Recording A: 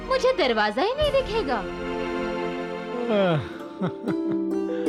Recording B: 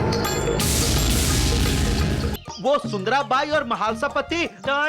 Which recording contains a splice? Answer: B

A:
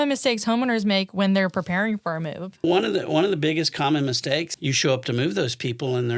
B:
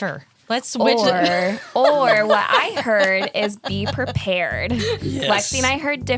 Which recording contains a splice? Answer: A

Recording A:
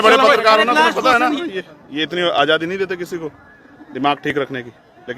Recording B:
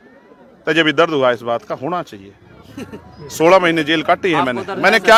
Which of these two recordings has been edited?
A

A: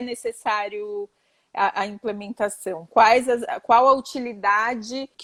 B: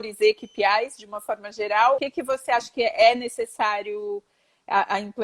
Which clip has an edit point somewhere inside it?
B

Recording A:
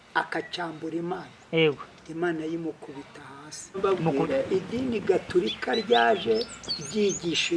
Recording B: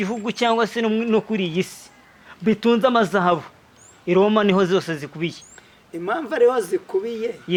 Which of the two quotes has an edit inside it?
A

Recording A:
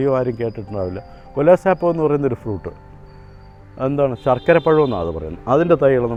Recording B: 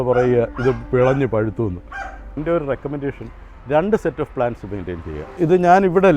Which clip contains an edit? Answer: B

